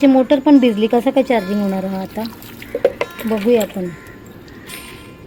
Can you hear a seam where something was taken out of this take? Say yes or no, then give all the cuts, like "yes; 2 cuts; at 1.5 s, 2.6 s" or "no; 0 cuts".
no; 0 cuts